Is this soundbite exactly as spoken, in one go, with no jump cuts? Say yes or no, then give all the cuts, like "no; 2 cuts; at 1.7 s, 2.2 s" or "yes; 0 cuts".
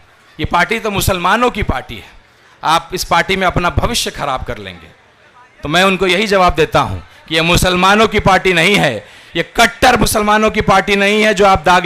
yes; 0 cuts